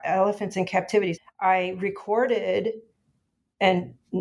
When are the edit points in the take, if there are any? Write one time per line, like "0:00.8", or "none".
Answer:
0:01.2